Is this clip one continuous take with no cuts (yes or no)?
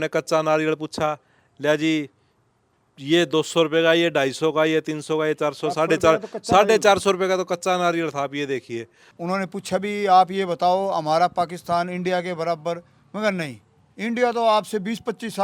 no